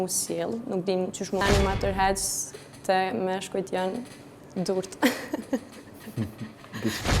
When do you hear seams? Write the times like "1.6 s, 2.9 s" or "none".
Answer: 1.4 s